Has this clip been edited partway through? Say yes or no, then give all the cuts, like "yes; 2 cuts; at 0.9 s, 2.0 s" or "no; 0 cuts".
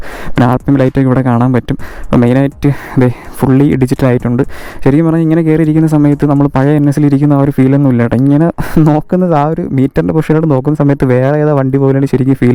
no; 0 cuts